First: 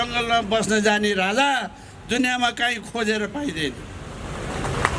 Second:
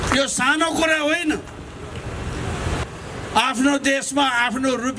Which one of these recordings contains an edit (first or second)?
second